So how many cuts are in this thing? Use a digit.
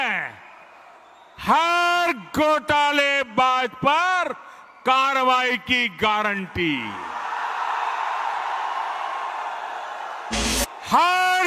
1